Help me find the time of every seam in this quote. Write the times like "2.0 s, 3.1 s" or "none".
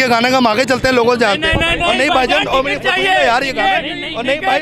none